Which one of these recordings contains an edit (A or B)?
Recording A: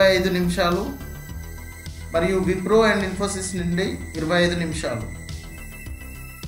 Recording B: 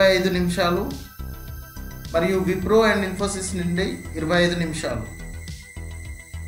B